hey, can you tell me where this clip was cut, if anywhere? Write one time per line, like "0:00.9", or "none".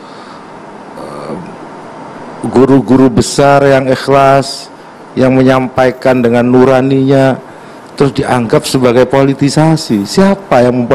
none